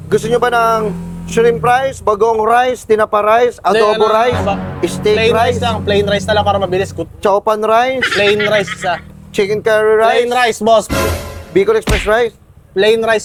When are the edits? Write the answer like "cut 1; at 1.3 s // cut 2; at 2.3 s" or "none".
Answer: none